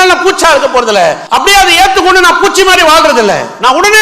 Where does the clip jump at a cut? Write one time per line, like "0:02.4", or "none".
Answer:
0:01.2